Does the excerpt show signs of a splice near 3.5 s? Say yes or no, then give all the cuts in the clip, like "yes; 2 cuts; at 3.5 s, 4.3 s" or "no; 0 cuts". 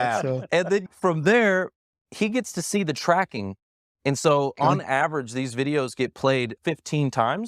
no; 2 cuts; at 0.9 s, 6.6 s